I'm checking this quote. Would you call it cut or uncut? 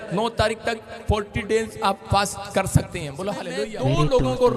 cut